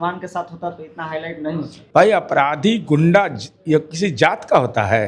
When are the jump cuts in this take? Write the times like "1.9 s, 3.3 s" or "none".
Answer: 1.8 s